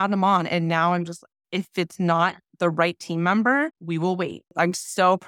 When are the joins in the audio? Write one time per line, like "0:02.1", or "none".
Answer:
0:04.2